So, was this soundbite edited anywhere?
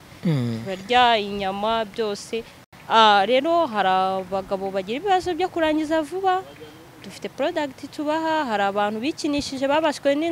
yes; 1 cut; at 2.6 s

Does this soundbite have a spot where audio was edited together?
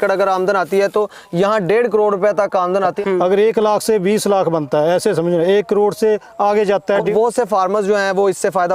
yes; 2 cuts; at 3.0 s, 7.1 s

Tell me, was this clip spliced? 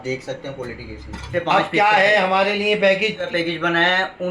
yes; 2 cuts; at 1.2 s, 3.2 s

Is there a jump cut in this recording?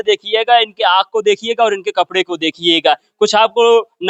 no; 0 cuts

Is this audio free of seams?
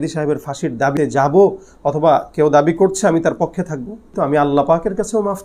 no; 2 cuts; at 0.9 s, 4.1 s

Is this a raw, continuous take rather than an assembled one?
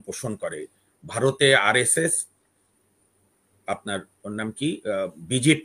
yes; 0 cuts

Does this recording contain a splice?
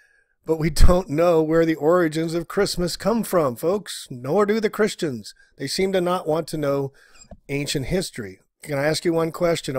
yes; 1 cut; at 7.1 s

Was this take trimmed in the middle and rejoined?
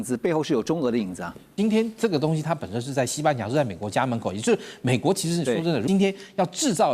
yes; 2 cuts; at 1.5 s, 5.8 s

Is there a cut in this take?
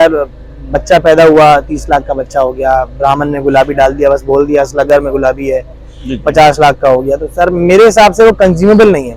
no; 0 cuts

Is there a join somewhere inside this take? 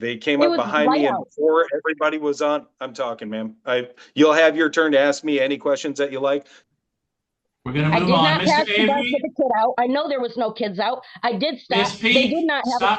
yes; 1 cut; at 6.6 s

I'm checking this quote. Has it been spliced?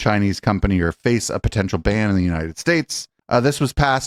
no; 0 cuts

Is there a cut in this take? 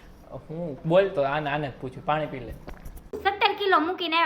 yes; 1 cut; at 3.2 s

